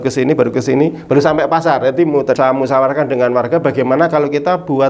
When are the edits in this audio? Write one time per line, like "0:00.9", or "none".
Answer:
0:02.4